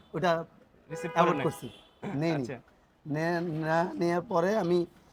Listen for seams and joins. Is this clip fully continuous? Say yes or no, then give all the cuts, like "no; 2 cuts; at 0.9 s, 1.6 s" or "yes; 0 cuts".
yes; 0 cuts